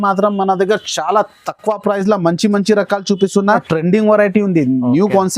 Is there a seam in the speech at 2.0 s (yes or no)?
no